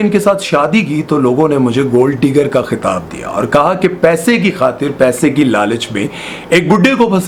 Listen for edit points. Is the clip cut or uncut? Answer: uncut